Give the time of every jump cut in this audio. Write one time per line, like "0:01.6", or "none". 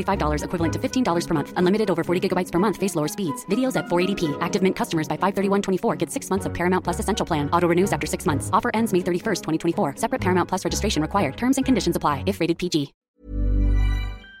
0:13.0